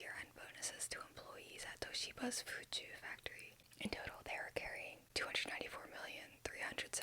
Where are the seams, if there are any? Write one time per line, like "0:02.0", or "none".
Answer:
0:03.6
0:05.0